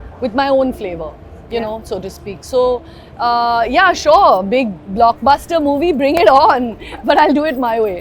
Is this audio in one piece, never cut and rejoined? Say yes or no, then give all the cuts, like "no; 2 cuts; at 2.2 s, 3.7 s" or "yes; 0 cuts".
yes; 0 cuts